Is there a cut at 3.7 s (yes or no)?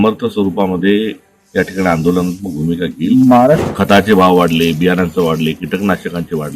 yes